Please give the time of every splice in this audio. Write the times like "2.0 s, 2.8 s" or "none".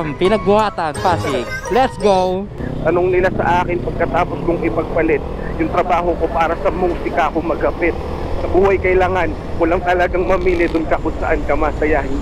2.6 s